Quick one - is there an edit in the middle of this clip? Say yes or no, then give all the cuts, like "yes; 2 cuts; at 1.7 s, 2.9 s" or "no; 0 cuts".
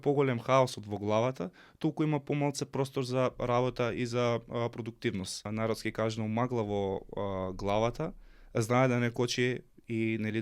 yes; 1 cut; at 5.5 s